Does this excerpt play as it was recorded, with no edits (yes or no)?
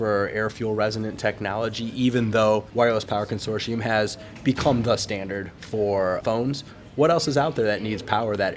no